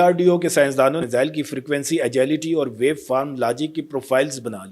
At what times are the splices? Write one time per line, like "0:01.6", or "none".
0:01.0